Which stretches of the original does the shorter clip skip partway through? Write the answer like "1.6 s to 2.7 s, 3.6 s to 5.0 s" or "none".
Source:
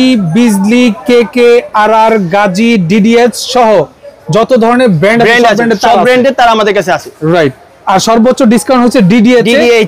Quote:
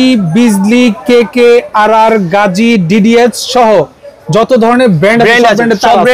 none